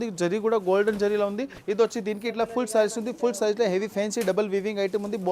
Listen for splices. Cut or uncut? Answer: cut